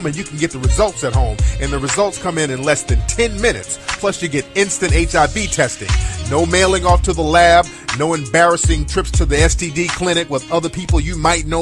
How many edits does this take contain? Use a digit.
1